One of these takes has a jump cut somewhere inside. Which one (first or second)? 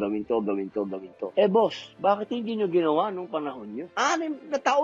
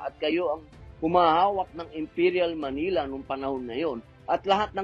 first